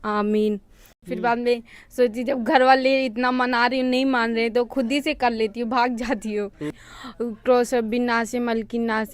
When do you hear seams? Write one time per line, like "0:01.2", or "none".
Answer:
0:01.1
0:06.8

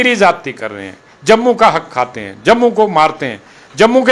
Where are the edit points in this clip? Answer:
none

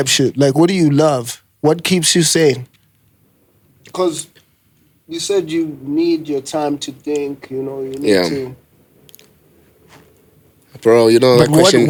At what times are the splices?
none

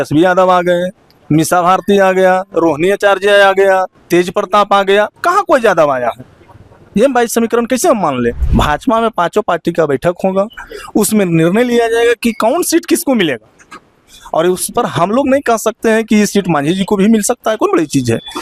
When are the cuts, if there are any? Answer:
0:08.4

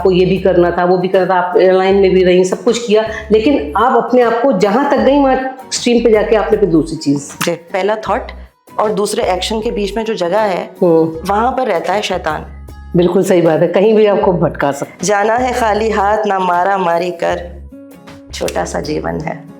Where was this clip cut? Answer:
0:07.7
0:14.9

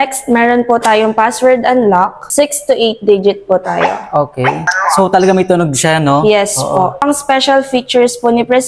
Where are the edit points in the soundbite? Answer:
0:02.2
0:04.7
0:07.0

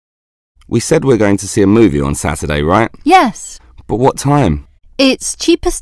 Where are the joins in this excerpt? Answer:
0:02.9

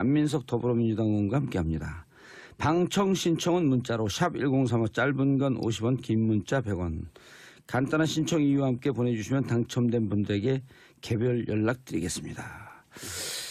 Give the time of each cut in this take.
none

